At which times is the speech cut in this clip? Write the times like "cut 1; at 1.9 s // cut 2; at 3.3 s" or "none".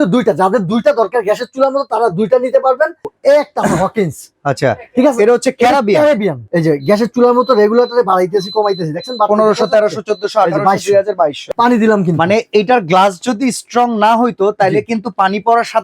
cut 1; at 3.1 s // cut 2; at 6.4 s // cut 3; at 11.4 s